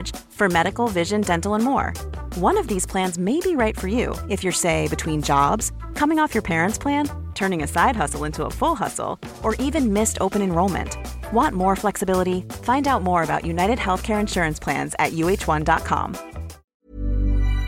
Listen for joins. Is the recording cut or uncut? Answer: cut